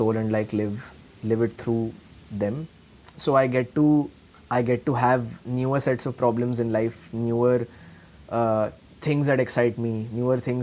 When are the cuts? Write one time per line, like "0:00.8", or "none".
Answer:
none